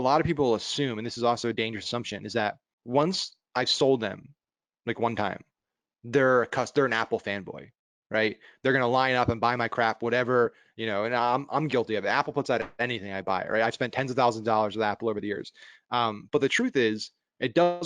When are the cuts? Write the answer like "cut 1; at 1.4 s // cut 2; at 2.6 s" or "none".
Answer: cut 1; at 2.7 s